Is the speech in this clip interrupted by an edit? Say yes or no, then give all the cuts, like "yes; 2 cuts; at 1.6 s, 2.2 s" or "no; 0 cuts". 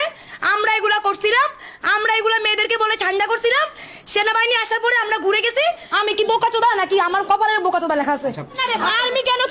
yes; 2 cuts; at 5.9 s, 8.6 s